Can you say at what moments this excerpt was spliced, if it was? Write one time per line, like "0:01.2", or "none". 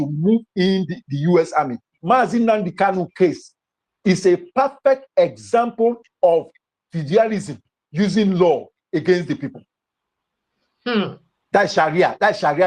0:01.8